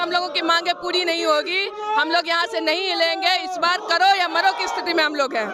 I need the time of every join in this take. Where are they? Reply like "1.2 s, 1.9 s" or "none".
none